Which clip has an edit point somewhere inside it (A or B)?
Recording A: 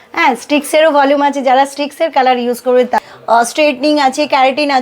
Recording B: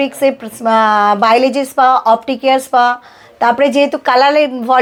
A